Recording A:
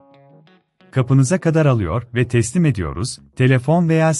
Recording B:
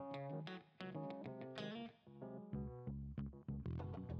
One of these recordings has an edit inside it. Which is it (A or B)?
A